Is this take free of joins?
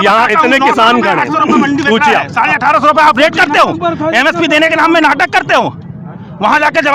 yes; 0 cuts

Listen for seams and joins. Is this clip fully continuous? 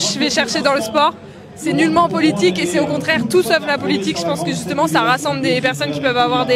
yes; 0 cuts

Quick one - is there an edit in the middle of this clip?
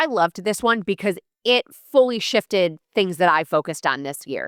no; 0 cuts

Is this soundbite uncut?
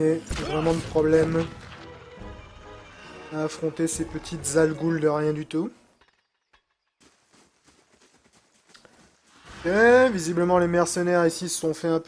yes; 0 cuts

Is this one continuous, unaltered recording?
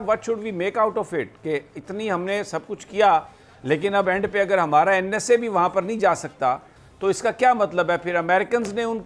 yes; 0 cuts

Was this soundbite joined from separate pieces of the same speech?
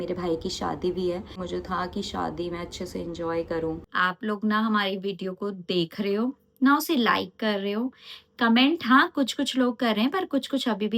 yes; 2 cuts; at 1.4 s, 3.8 s

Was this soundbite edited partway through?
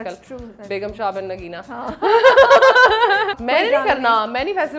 yes; 1 cut; at 3.4 s

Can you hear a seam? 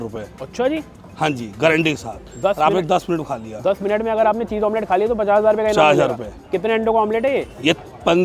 no; 0 cuts

